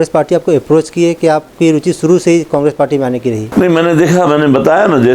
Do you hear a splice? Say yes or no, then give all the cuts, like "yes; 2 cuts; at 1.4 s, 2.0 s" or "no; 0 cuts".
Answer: no; 0 cuts